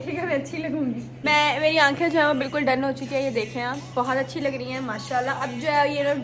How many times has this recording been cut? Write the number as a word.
zero